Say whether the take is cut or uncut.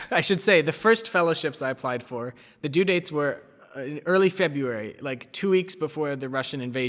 uncut